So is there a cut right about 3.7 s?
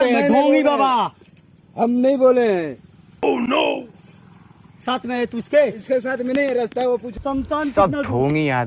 no; 1 cut; at 7.1 s

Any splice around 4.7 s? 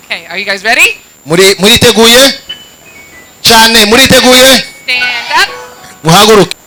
no; 0 cuts

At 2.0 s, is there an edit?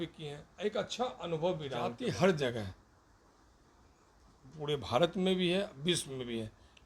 yes; 1 cut; at 2.0 s

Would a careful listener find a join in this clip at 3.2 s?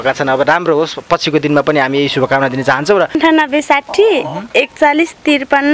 yes; 1 cut; at 3.2 s

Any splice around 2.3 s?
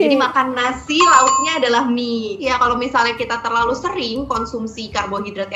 yes; 1 cut; at 2.3 s

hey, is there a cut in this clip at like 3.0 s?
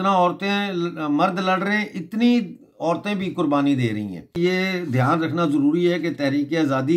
no; 1 cut; at 4.4 s

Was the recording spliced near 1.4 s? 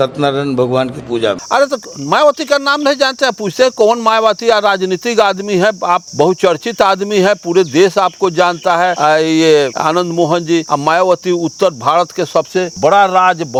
no; 0 cuts

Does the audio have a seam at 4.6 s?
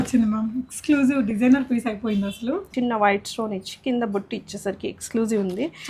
no; 1 cut; at 2.7 s

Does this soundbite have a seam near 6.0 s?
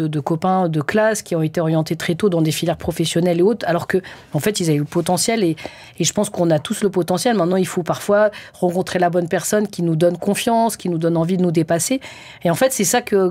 no; 0 cuts

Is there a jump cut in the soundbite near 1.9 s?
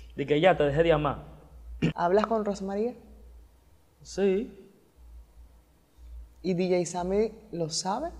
yes; 1 cut; at 1.9 s

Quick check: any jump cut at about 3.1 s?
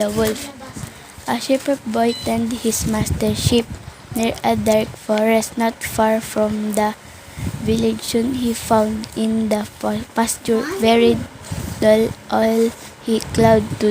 no; 2 cuts; at 4.3 s, 12.2 s

